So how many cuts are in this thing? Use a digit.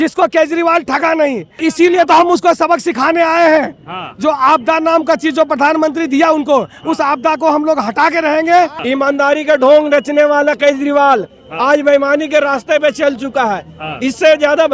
2